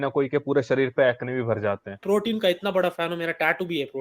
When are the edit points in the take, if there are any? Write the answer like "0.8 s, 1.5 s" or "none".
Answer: 2.0 s

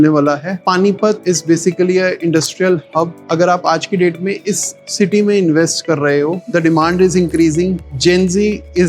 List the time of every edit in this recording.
6.4 s

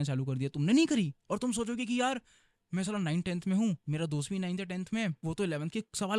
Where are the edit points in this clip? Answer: 3.8 s, 5.2 s

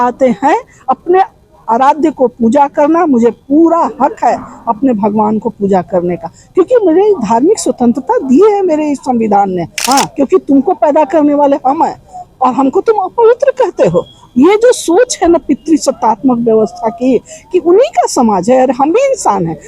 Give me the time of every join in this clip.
9.7 s

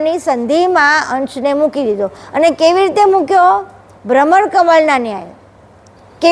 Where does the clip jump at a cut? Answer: none

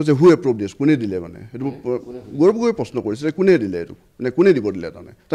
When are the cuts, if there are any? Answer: none

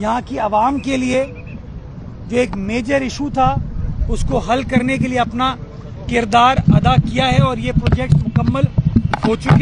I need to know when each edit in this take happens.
none

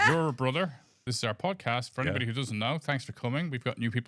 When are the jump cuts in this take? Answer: 1.0 s

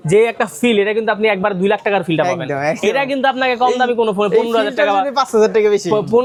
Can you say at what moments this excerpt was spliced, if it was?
none

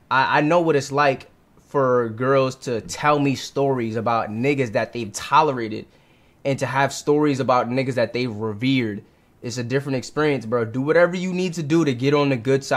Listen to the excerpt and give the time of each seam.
none

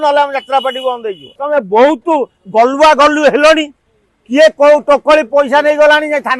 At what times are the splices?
1.3 s

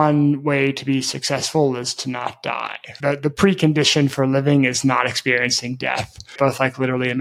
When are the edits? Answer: none

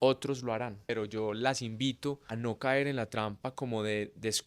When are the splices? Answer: 0.9 s, 2.3 s

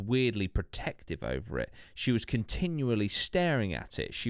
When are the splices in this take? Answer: none

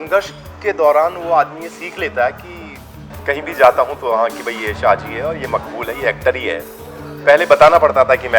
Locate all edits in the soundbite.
3.1 s

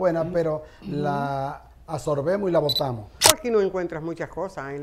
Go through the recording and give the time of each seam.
3.1 s

